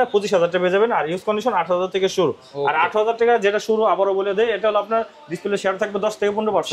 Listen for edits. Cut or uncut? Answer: uncut